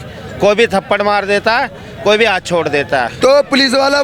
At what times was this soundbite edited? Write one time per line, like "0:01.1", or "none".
0:03.1